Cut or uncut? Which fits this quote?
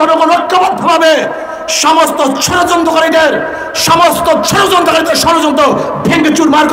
uncut